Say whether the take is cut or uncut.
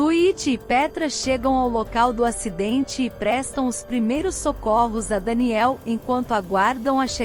uncut